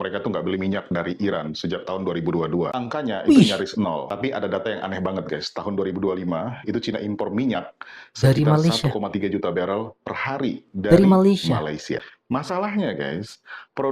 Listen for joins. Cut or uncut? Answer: uncut